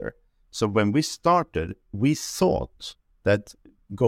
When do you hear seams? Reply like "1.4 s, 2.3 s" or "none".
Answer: 1.9 s